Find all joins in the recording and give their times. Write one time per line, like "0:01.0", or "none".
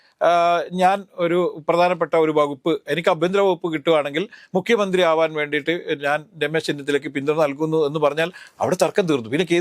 none